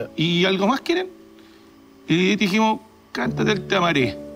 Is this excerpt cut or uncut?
uncut